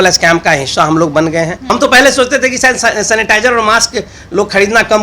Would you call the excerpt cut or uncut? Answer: cut